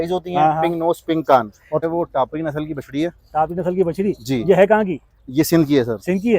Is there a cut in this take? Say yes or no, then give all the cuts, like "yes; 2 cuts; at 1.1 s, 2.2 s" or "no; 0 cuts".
yes; 1 cut; at 1.8 s